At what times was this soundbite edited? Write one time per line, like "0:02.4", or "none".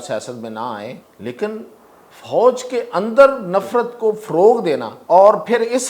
0:01.1
0:04.9